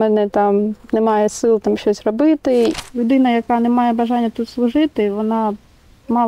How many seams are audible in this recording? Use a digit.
1